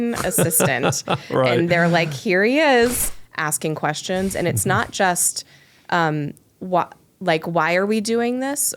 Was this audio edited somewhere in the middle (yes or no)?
yes